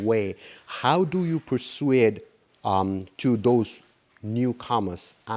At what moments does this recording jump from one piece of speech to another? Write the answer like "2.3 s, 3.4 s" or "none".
none